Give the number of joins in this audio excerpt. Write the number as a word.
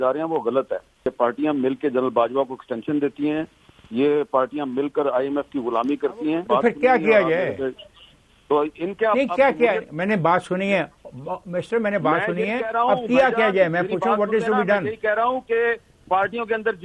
two